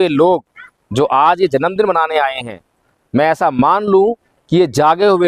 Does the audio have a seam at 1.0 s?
no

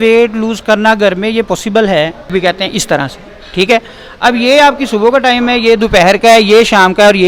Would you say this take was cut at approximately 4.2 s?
no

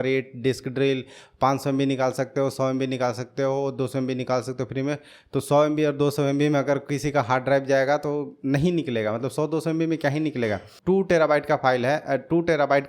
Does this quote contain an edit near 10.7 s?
yes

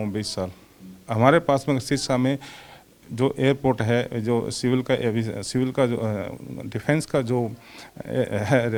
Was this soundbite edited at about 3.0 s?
no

